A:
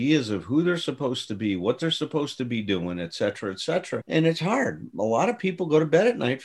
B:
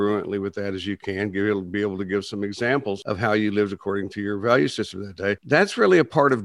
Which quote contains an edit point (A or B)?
B